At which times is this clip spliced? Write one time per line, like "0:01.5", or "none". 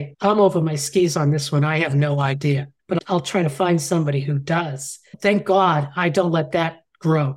0:02.7
0:05.0